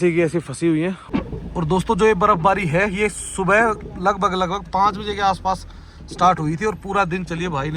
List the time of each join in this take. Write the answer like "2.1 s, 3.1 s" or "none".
1.0 s